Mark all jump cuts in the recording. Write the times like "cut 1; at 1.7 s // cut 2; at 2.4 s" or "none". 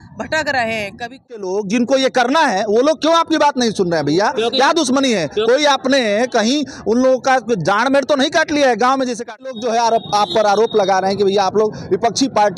cut 1; at 1.4 s // cut 2; at 9.6 s

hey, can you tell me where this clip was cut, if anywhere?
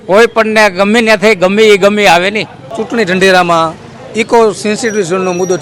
cut 1; at 2.8 s

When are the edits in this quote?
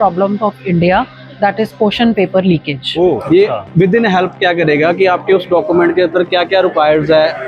cut 1; at 3.2 s

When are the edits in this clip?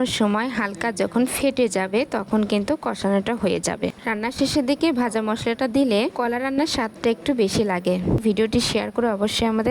cut 1; at 4.0 s // cut 2; at 8.2 s

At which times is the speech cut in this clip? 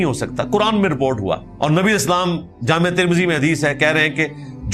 cut 1; at 1.5 s

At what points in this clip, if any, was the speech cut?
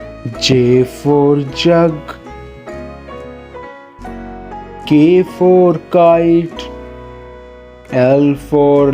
cut 1; at 6.5 s // cut 2; at 7.9 s

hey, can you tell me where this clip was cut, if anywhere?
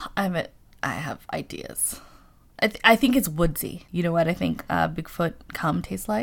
cut 1; at 3.8 s

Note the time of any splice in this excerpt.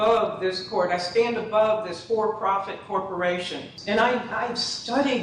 cut 1; at 3.7 s

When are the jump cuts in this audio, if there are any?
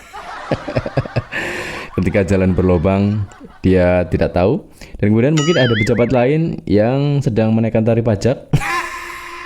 none

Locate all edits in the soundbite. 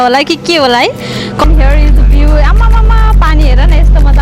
cut 1; at 1.4 s

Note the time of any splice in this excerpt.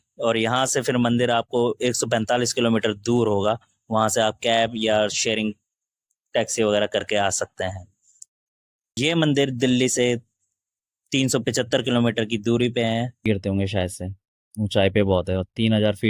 cut 1; at 8.8 s // cut 2; at 13.3 s

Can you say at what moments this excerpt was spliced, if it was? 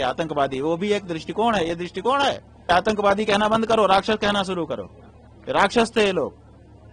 cut 1; at 2.7 s

